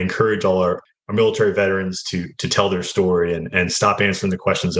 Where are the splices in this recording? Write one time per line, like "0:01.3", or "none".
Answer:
0:00.9
0:03.5